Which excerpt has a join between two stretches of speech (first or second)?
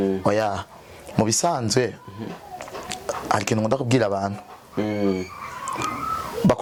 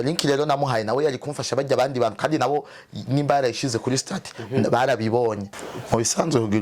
second